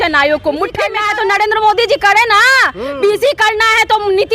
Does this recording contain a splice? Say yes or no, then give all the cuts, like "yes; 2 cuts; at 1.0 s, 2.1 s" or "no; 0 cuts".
yes; 1 cut; at 1.0 s